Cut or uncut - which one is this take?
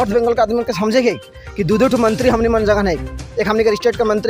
uncut